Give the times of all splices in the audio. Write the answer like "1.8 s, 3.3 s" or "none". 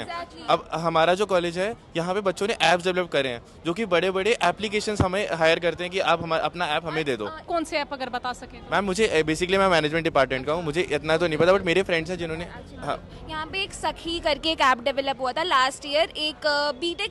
7.5 s